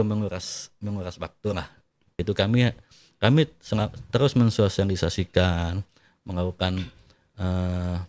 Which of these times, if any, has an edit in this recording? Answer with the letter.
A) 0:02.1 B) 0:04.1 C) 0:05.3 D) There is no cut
A